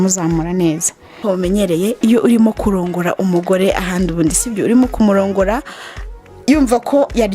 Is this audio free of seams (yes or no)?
no